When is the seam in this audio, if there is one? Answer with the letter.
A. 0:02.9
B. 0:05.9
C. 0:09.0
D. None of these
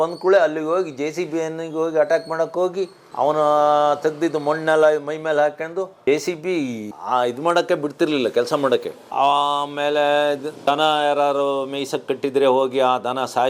D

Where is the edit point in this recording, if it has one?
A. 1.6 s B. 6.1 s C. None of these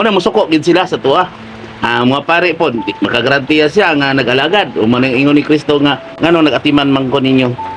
B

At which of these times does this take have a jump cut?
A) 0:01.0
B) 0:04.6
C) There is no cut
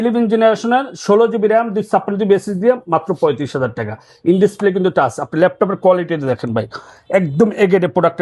C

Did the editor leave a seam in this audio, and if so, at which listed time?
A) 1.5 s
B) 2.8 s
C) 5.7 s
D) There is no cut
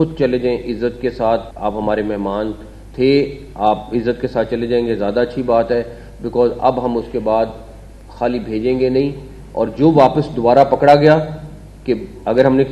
A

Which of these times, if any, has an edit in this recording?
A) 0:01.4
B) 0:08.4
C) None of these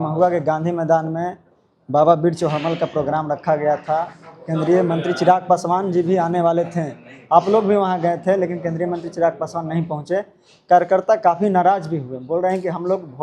C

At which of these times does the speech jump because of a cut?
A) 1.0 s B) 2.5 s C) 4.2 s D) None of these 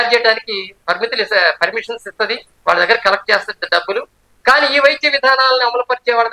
B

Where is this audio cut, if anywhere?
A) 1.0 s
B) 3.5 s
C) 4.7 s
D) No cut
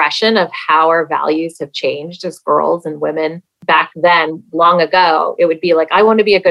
B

